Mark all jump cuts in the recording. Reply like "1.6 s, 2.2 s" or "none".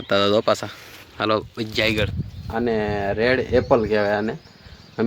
2.2 s